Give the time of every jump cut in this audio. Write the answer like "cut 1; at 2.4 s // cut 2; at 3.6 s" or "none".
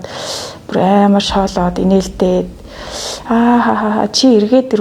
none